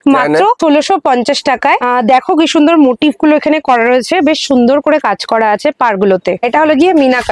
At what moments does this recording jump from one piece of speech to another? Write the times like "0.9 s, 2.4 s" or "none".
none